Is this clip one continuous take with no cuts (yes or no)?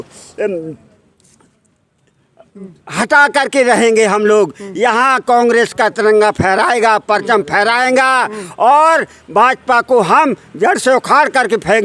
yes